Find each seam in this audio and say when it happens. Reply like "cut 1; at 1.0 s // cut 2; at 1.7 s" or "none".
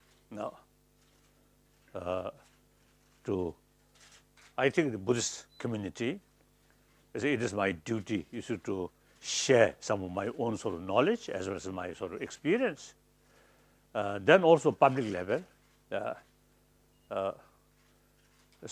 cut 1; at 5.4 s